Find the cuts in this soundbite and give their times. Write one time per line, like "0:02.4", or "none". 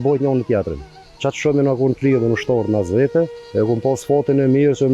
0:03.4